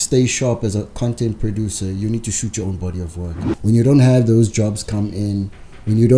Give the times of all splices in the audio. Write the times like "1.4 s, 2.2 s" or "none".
3.4 s

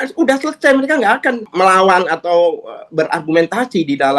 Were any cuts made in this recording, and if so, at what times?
1.5 s

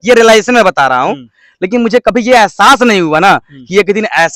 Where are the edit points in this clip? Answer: none

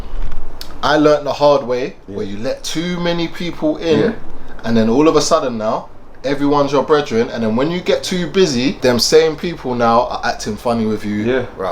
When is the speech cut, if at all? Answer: 8.8 s

